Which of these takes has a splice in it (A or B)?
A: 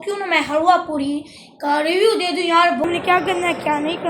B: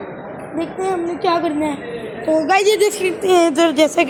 A